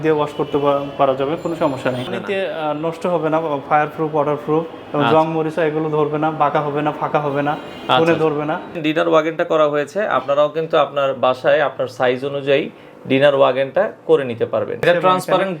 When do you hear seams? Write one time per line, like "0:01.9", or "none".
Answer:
0:02.1
0:08.8
0:14.9